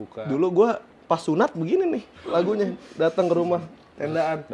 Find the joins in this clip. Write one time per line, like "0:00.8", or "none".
none